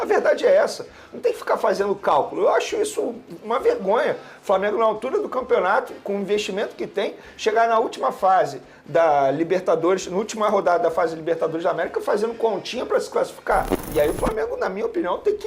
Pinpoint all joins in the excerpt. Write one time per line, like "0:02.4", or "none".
0:13.8